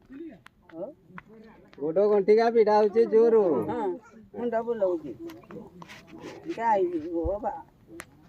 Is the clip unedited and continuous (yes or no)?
no